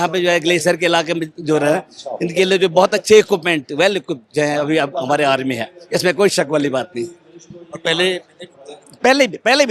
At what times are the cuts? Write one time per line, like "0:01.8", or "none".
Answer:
none